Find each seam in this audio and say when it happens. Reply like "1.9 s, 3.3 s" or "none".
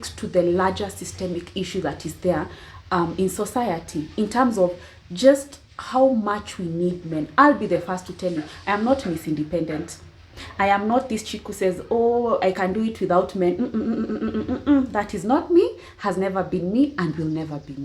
none